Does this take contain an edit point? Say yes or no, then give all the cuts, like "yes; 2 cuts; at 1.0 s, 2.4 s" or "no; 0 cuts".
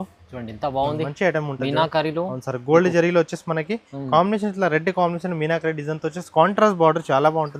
no; 0 cuts